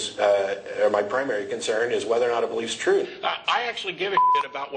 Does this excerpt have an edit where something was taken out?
yes; 1 cut; at 3.1 s

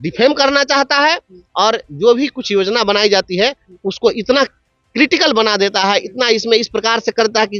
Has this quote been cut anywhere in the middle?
no; 0 cuts

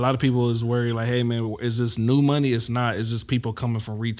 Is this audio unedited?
yes; 0 cuts

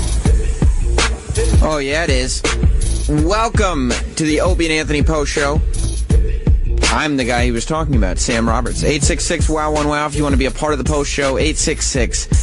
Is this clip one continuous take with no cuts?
yes; 0 cuts

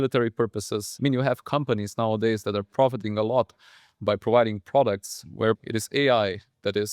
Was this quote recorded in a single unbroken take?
no; 2 cuts; at 0.9 s, 5.6 s

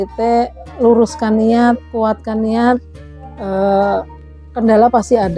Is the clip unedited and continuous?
yes; 0 cuts

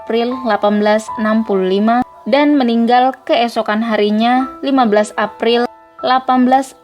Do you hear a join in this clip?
no; 0 cuts

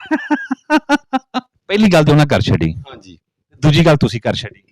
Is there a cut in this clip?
yes; 1 cut; at 1.5 s

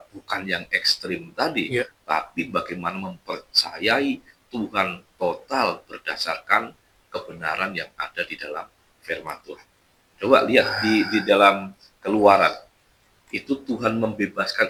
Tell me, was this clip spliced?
no; 0 cuts

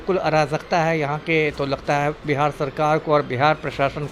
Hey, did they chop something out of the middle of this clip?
no; 0 cuts

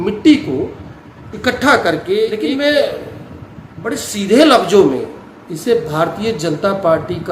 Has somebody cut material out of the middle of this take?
yes; 1 cut; at 2.3 s

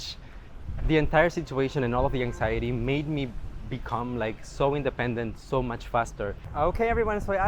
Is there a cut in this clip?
yes; 1 cut; at 6.4 s

